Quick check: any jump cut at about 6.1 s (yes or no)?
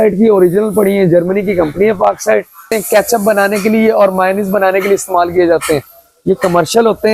no